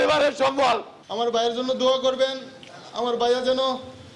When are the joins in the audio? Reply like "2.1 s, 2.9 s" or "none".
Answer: 0.9 s

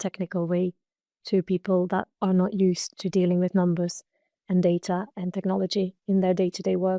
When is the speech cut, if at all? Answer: none

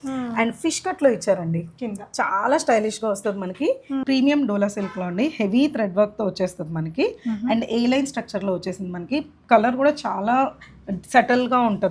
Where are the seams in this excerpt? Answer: 4.0 s

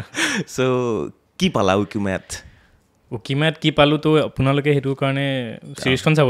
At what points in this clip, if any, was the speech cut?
none

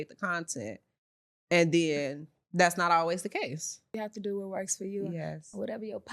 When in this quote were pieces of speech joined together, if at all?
4.0 s

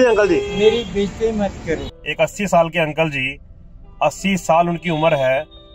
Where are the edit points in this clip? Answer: 1.9 s

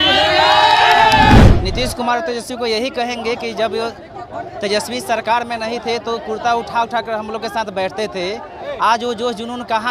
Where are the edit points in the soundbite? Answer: 1.4 s

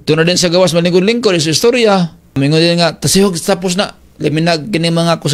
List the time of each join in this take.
2.4 s

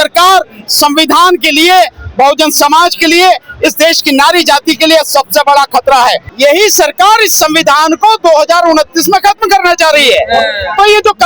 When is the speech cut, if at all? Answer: 6.3 s

